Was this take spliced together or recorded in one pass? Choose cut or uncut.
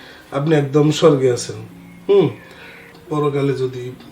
cut